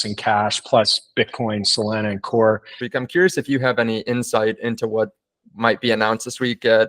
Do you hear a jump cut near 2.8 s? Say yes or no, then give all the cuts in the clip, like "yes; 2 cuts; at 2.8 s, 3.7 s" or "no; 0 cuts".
yes; 1 cut; at 2.8 s